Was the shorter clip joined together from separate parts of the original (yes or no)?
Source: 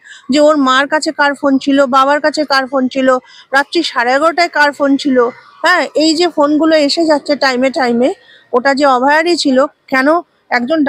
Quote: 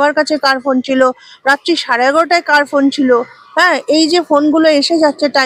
no